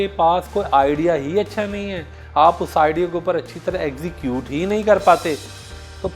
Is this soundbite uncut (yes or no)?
yes